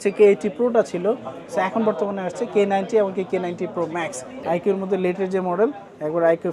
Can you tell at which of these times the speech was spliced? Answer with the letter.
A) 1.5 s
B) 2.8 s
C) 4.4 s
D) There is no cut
C